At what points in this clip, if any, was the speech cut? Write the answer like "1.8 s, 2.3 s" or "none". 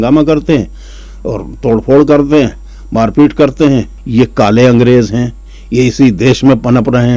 4.0 s